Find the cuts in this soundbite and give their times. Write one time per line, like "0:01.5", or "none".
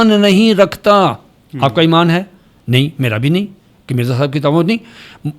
none